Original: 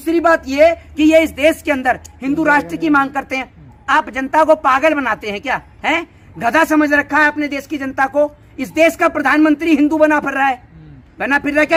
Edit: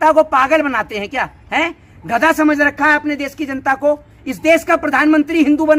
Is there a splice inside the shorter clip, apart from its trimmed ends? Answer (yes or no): no